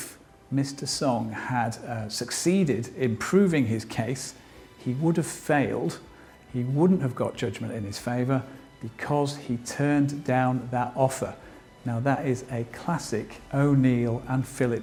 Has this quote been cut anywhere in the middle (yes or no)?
no